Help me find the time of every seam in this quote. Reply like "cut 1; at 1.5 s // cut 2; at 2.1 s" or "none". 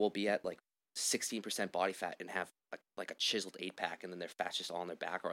none